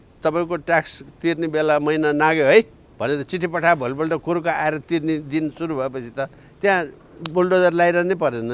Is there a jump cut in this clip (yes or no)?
no